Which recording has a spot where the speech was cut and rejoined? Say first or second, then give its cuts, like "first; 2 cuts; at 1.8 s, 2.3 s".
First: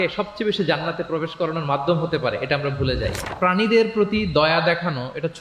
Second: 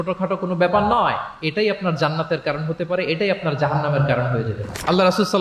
first; 1 cut; at 3.3 s